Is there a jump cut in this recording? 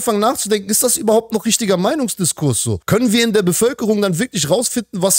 yes; 1 cut; at 2.7 s

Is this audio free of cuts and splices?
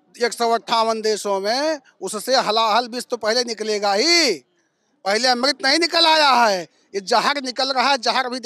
yes; 0 cuts

